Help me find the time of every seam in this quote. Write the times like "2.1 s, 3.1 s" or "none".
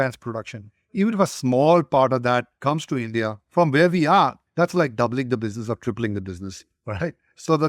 2.5 s, 4.4 s

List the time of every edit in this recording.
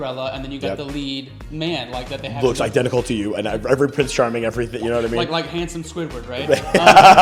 none

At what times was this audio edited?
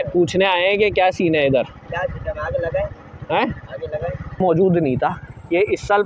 4.4 s

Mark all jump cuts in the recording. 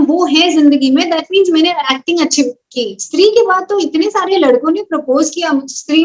3.0 s

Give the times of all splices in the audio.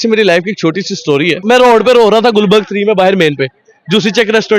1.4 s

